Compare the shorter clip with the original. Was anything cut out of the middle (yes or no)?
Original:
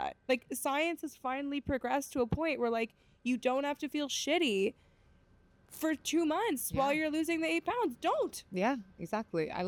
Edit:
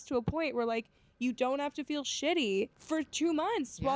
yes